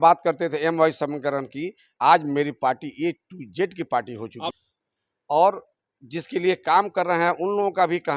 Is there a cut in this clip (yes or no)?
yes